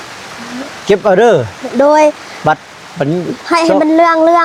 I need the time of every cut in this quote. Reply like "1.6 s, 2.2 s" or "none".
none